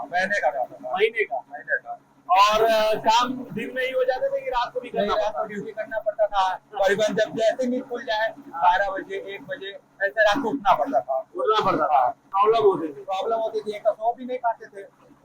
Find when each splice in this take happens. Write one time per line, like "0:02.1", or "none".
0:12.2